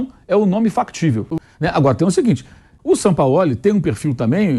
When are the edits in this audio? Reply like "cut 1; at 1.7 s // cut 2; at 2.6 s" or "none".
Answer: cut 1; at 1.3 s // cut 2; at 2.7 s